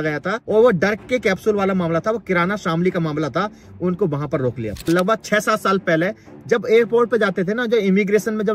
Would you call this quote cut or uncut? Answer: cut